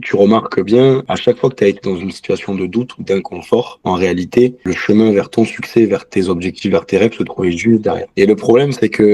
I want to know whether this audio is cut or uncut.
cut